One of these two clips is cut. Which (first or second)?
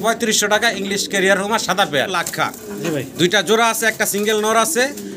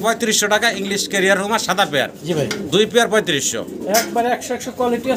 first